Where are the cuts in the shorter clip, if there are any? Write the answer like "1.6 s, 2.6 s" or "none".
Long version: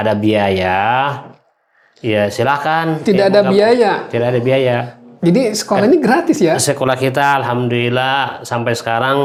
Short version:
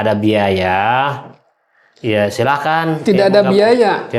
none